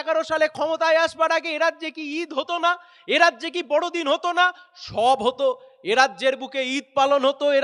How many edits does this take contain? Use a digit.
0